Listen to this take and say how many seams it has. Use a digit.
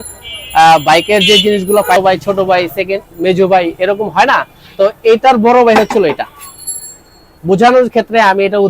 1